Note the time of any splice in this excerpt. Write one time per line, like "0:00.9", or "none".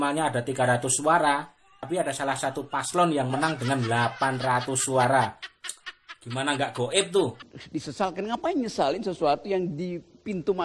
0:07.5